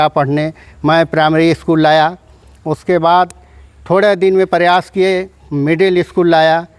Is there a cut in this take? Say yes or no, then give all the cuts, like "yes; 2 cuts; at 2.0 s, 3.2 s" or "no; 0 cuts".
no; 0 cuts